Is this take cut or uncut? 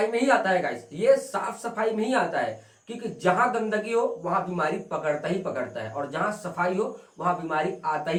uncut